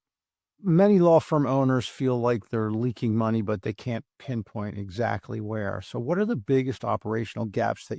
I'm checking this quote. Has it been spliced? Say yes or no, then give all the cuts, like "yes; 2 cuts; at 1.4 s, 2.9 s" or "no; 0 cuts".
no; 0 cuts